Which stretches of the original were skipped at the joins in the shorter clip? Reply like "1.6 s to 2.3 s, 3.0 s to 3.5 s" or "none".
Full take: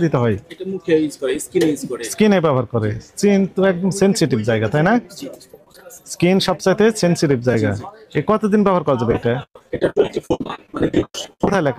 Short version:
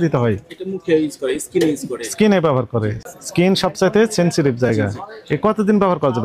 3.0 s to 5.9 s